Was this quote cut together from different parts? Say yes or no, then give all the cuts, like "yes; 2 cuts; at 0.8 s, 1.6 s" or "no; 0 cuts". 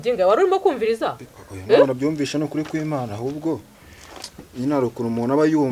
no; 0 cuts